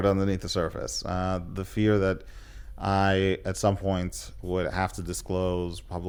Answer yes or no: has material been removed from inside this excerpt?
no